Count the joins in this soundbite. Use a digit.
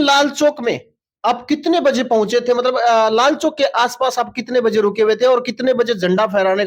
0